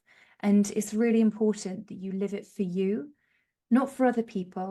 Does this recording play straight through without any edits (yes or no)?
yes